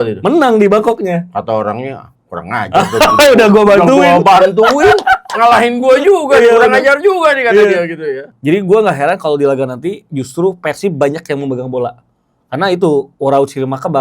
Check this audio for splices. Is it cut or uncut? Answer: cut